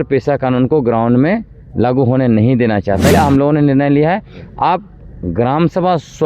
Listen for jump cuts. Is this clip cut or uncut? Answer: cut